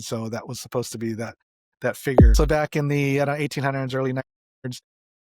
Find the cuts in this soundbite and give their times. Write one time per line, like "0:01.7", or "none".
0:02.3